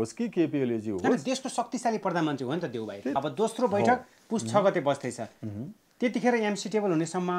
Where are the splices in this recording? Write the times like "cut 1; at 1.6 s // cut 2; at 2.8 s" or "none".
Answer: cut 1; at 3.1 s